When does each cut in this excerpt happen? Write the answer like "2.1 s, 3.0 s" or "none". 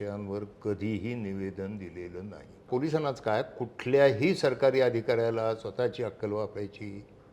2.7 s